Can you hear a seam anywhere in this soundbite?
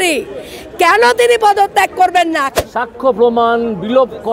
yes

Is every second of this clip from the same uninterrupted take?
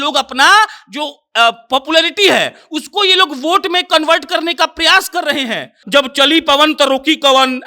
no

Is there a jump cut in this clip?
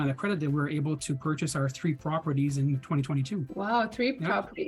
yes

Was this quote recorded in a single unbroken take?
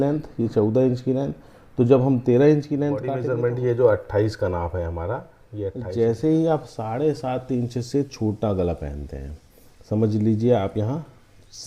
no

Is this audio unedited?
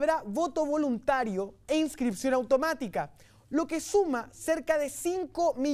yes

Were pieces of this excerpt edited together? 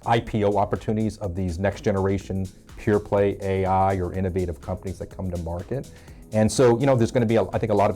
no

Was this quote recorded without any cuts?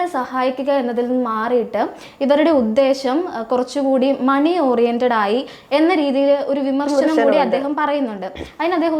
yes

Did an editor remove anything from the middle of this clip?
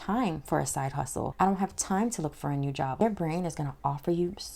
yes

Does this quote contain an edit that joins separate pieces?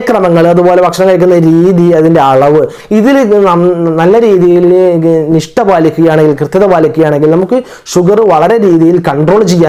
no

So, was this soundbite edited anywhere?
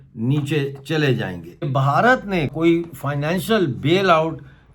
yes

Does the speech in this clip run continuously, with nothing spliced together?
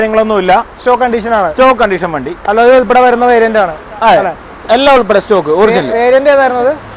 yes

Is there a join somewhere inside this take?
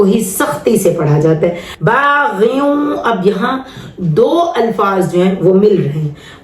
yes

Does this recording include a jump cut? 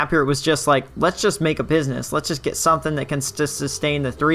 no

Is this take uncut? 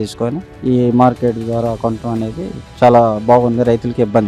yes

